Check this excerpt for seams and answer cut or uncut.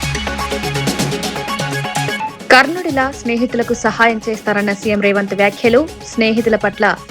cut